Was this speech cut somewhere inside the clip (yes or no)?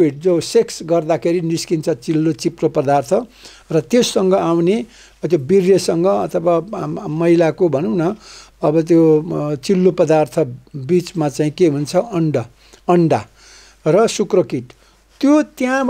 no